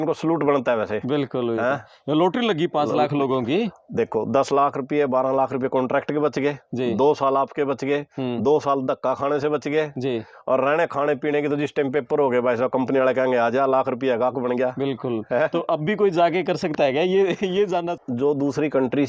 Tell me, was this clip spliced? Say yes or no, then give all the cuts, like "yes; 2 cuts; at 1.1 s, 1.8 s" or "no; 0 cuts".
yes; 1 cut; at 17.9 s